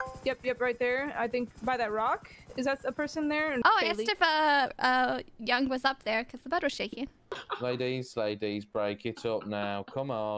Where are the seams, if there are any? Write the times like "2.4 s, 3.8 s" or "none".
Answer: 3.6 s, 7.4 s